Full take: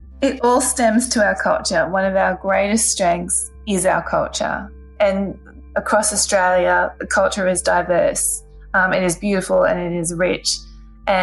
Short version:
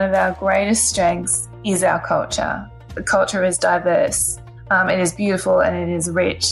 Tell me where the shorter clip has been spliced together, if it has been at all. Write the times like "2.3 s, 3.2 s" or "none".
2.9 s